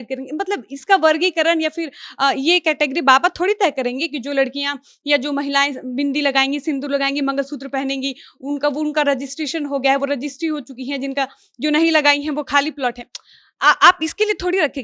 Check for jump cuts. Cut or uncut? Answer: uncut